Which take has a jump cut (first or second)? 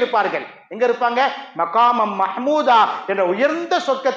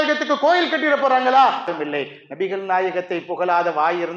second